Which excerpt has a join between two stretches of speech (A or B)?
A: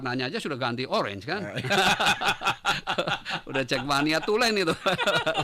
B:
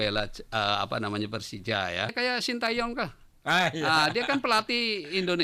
B